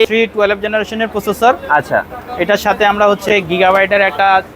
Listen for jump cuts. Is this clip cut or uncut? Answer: uncut